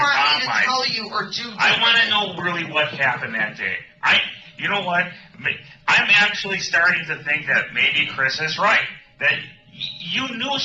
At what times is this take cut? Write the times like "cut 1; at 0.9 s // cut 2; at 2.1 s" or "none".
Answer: none